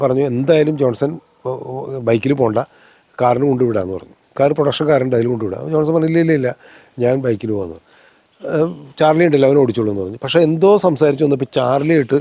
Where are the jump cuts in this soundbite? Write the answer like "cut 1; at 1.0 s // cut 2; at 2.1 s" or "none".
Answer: none